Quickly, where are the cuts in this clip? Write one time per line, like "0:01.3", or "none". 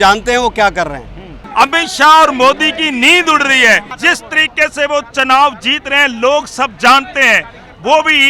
0:01.4
0:03.9